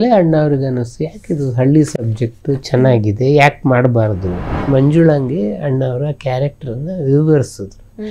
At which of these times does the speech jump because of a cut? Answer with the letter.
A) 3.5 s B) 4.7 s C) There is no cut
B